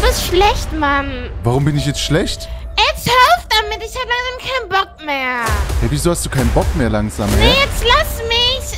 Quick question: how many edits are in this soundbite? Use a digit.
0